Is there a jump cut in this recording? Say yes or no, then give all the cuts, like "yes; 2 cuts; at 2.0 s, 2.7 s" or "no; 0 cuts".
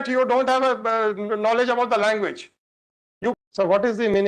yes; 1 cut; at 3.4 s